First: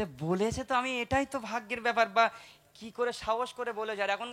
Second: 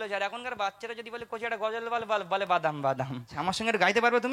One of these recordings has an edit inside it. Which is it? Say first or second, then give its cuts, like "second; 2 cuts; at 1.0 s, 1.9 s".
second; 1 cut; at 3.3 s